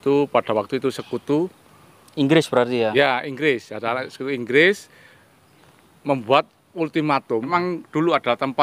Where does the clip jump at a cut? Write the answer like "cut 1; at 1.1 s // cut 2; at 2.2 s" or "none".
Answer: cut 1; at 7.5 s